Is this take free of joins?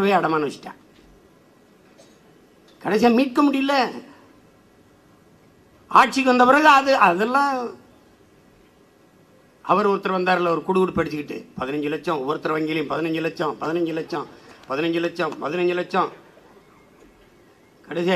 yes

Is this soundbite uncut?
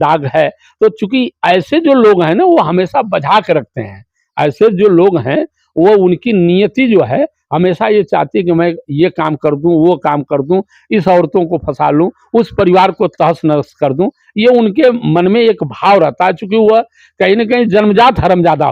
yes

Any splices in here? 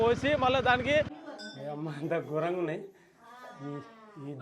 yes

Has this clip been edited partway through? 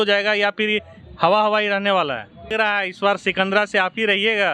yes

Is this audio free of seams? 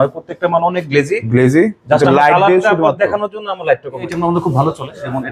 no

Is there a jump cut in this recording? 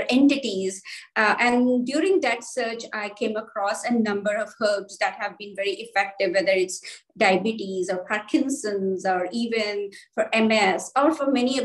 no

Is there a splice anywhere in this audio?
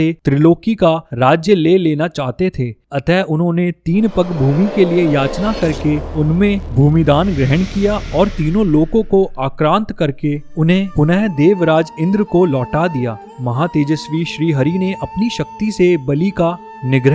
no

